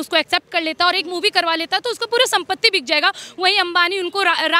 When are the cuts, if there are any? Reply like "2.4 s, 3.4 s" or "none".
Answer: none

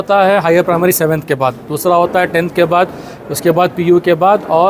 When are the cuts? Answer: none

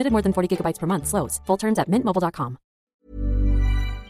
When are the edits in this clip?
2.7 s

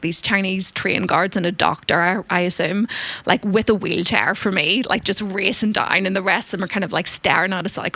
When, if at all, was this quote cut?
none

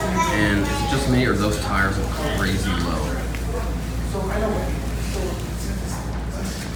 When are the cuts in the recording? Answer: none

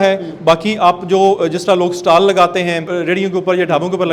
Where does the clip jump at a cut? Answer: 2.9 s

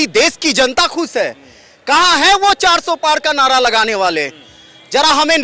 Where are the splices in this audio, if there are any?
none

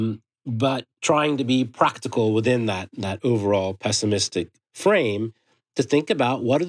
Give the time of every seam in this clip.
0.9 s, 4.6 s

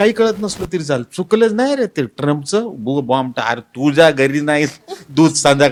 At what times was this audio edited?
none

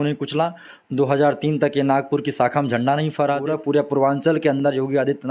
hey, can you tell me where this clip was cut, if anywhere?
3.4 s

